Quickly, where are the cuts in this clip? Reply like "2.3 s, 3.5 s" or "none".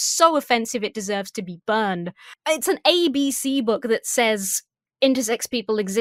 none